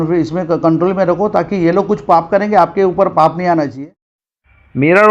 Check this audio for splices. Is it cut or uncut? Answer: cut